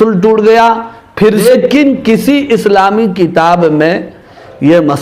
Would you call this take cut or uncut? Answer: cut